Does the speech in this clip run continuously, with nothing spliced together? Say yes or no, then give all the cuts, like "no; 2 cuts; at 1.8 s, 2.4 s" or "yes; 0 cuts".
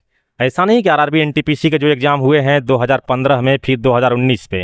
yes; 0 cuts